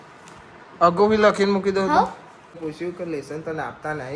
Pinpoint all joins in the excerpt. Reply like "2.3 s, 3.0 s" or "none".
2.5 s